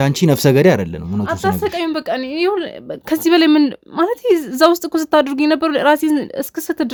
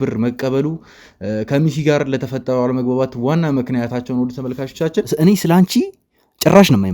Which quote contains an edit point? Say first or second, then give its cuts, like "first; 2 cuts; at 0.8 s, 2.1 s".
second; 1 cut; at 5.1 s